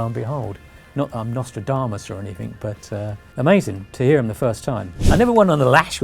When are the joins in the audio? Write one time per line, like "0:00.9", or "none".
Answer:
0:03.2
0:04.9